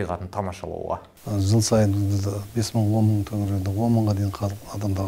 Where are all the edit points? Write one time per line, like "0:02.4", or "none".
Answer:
none

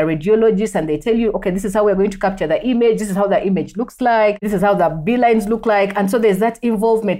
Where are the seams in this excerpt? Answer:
0:04.5

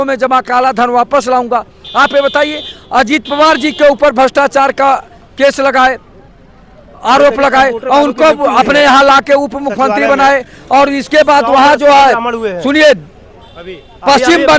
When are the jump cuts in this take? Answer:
none

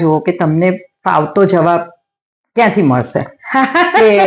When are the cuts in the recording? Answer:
none

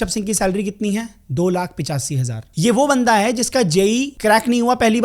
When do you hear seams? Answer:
0:02.4
0:04.1

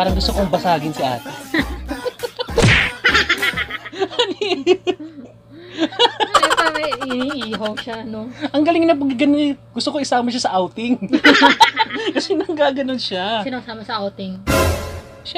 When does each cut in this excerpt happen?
none

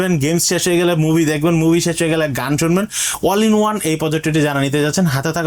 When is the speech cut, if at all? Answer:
none

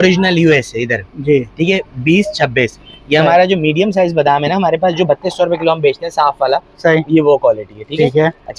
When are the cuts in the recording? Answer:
none

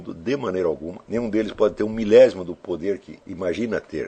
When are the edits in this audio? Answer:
0:00.9
0:03.2

